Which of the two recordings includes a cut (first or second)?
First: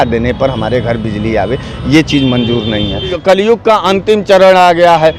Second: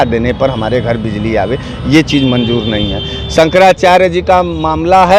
first